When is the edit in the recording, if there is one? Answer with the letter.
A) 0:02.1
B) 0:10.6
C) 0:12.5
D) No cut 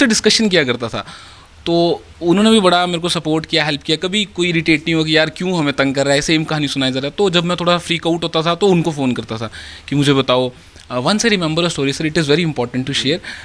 D